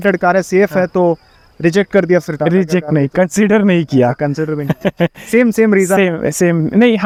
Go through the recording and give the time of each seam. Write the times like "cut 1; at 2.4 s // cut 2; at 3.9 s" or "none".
none